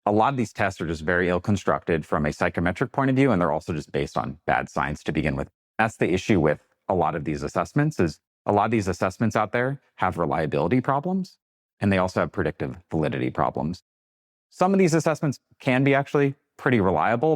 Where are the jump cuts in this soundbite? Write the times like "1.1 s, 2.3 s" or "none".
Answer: 5.8 s, 13.8 s